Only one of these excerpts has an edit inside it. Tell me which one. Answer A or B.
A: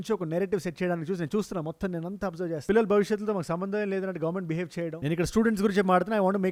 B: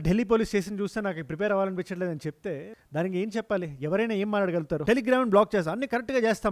B